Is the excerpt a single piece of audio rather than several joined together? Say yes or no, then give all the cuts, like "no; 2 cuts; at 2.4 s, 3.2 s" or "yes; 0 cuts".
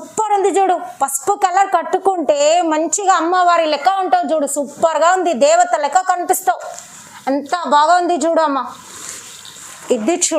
yes; 0 cuts